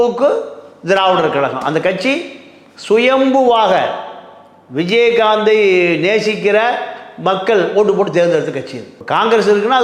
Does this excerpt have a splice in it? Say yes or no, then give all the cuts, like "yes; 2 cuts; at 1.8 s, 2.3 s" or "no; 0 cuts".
no; 0 cuts